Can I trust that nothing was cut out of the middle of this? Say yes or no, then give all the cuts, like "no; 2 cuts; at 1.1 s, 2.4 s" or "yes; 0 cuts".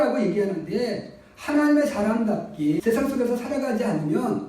no; 1 cut; at 2.8 s